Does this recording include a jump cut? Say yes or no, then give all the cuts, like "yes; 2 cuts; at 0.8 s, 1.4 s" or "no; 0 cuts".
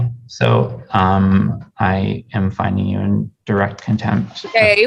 no; 0 cuts